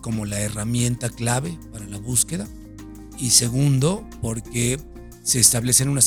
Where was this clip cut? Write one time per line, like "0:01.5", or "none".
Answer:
none